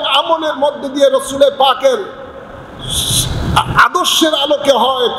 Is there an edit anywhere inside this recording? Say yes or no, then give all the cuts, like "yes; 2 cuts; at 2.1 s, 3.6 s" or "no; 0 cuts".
no; 0 cuts